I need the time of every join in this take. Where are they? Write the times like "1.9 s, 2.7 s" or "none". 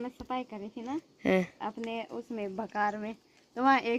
none